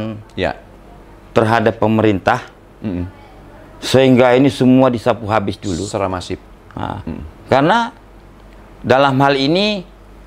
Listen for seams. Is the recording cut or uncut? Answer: uncut